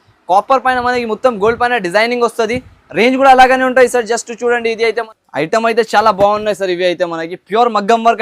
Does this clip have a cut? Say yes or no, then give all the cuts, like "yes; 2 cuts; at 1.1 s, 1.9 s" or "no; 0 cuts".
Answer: yes; 1 cut; at 5.1 s